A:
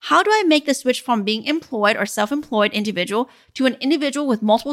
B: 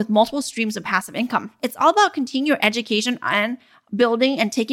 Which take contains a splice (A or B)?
B